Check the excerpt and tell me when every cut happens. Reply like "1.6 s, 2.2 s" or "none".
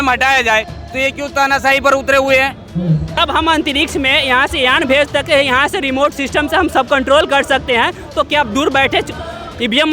3.2 s